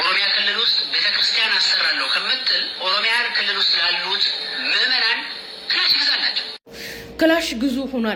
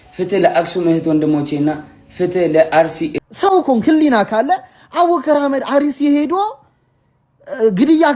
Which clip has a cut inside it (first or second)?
second